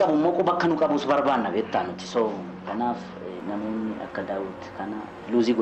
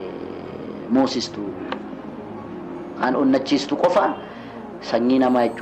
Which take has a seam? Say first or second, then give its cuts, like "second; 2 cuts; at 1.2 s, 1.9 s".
first; 1 cut; at 3.4 s